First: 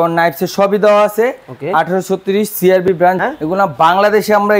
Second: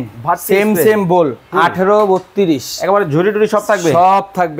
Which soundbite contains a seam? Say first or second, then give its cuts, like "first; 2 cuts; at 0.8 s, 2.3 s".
first; 1 cut; at 3.2 s